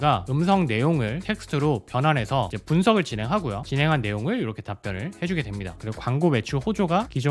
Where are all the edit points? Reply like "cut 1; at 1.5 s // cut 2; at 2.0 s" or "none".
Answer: cut 1; at 5.8 s

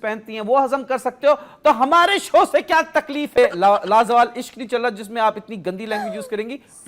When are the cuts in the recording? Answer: cut 1; at 3.4 s

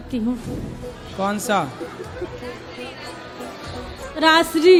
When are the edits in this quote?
none

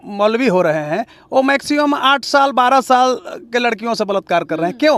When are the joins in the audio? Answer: none

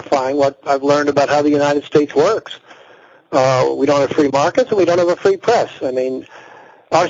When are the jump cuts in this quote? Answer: none

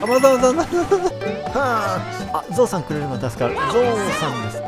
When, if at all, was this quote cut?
cut 1; at 1.1 s

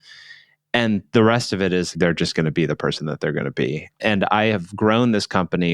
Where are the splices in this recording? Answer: cut 1; at 1.9 s // cut 2; at 3.8 s

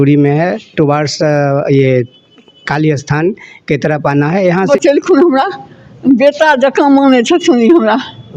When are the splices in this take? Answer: cut 1; at 4.7 s

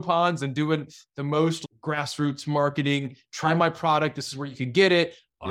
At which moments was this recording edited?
cut 1; at 1.6 s

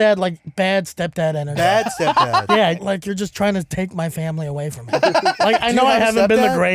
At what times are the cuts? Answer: cut 1; at 2.8 s // cut 2; at 4.9 s

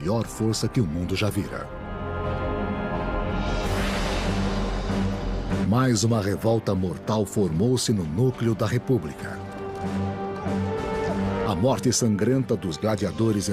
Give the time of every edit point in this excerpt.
none

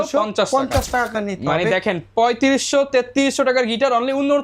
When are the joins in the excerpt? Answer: cut 1; at 1.1 s

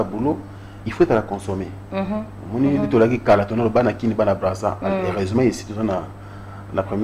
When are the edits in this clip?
none

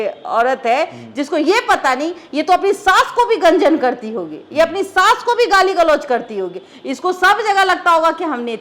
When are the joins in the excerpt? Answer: none

